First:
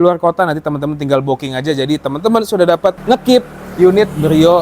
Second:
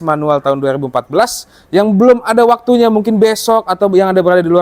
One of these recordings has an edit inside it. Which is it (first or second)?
first